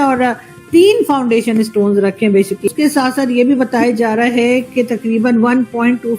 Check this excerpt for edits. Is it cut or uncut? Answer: cut